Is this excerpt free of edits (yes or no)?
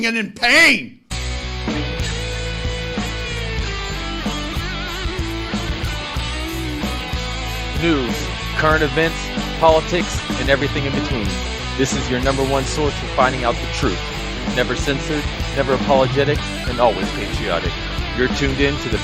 no